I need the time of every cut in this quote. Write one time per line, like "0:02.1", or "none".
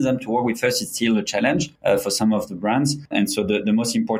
0:01.7
0:03.1